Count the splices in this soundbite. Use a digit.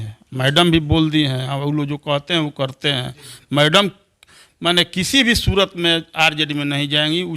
0